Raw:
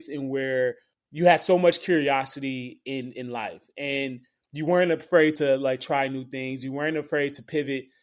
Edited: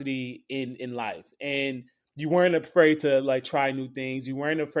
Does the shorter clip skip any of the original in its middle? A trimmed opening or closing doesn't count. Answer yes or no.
no